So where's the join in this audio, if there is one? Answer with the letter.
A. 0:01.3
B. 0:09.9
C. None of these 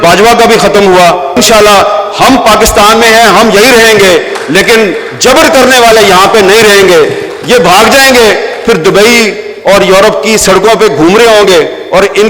A